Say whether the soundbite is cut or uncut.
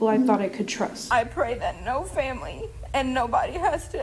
cut